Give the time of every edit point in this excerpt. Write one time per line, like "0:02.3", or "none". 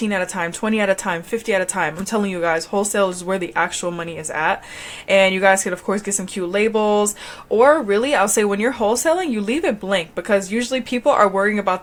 none